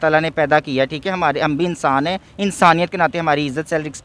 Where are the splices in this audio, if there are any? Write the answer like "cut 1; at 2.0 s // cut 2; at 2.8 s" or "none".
none